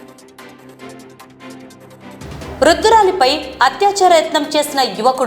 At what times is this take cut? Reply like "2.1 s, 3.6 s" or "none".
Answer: 1.3 s